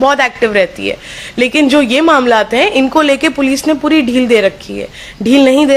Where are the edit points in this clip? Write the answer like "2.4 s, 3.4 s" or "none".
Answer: none